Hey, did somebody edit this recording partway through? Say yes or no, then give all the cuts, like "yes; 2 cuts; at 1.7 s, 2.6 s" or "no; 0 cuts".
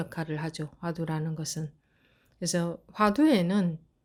no; 0 cuts